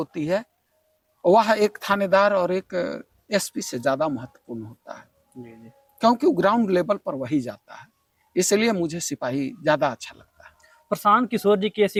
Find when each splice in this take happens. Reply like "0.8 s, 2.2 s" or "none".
none